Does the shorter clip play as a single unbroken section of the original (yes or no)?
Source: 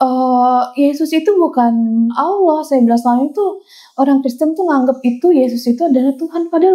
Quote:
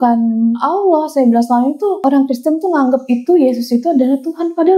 no